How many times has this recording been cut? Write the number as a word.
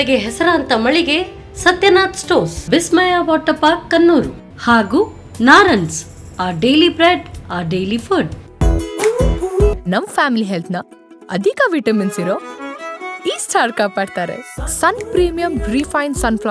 one